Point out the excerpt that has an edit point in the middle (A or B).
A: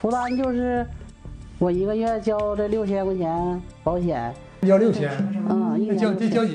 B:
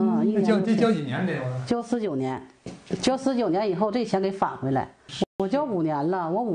A